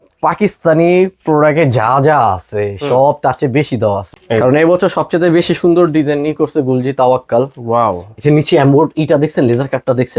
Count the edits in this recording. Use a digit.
1